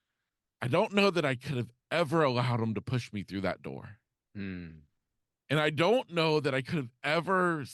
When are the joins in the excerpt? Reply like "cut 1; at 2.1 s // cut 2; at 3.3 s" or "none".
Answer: none